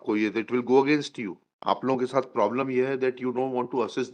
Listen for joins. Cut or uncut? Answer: cut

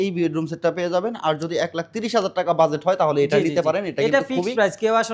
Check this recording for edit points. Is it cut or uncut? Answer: uncut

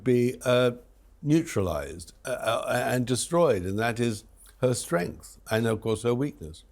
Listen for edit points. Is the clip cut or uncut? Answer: uncut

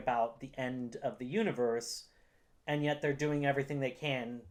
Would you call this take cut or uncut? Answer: uncut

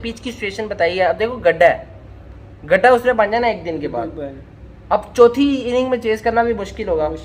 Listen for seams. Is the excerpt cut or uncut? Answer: uncut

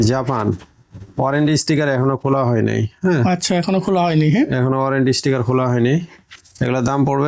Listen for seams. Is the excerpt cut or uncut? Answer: uncut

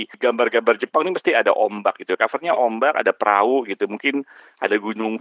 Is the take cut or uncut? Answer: uncut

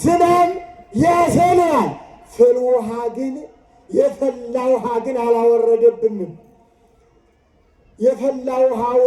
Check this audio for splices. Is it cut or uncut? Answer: uncut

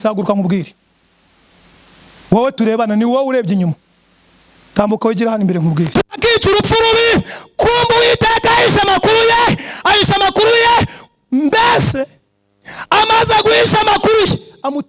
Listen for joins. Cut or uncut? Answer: cut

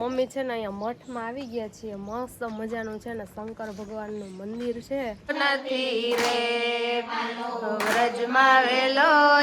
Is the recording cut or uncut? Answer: cut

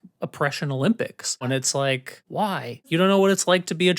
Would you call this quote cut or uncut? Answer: cut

